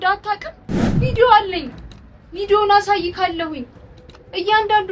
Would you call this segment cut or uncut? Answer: cut